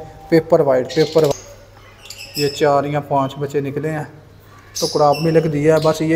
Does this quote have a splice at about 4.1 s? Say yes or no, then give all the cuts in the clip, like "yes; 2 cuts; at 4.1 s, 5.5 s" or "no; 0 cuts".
no; 1 cut; at 1.3 s